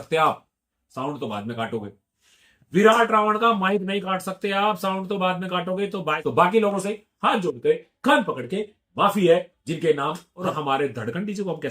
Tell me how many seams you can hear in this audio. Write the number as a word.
two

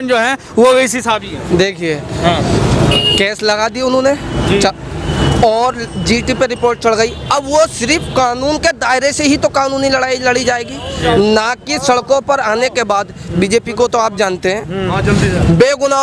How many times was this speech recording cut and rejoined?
zero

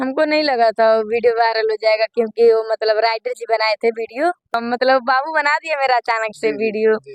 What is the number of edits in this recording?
one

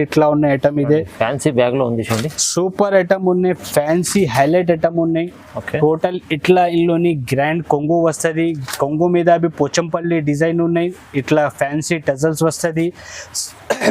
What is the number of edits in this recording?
zero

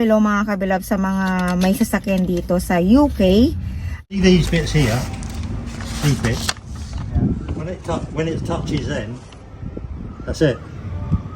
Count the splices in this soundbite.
one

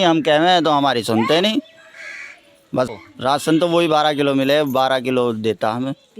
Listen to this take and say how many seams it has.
one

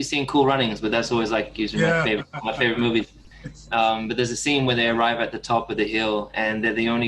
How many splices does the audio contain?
zero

